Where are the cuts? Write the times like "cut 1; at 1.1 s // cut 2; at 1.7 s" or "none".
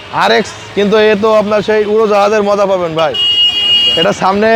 none